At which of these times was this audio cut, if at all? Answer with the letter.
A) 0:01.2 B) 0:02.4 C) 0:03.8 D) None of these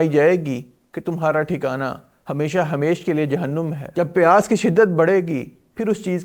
C